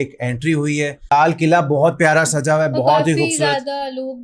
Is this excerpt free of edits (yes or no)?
no